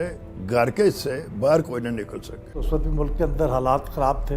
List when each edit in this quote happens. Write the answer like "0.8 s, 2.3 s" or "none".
2.6 s